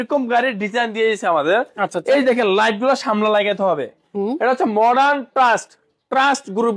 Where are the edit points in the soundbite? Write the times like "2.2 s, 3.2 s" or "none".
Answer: none